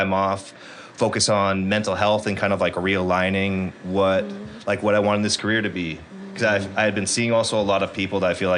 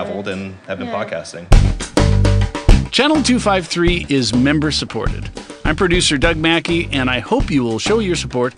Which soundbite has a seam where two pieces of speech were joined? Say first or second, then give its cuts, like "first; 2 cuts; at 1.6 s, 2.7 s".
second; 1 cut; at 1.4 s